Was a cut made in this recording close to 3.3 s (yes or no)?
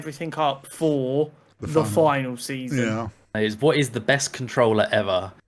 yes